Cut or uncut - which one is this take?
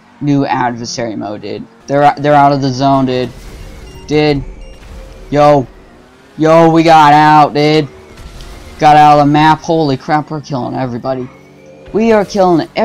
cut